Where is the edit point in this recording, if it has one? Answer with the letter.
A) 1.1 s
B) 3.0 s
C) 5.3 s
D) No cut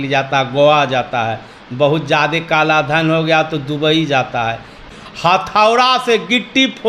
C